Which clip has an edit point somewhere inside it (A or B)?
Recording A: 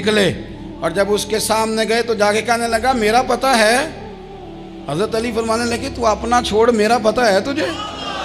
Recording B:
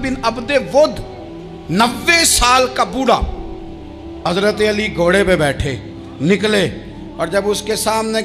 B